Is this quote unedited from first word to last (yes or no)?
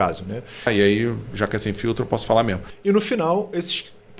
no